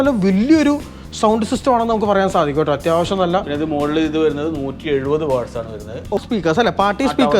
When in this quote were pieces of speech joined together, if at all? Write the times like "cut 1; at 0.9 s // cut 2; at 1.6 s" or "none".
cut 1; at 6.2 s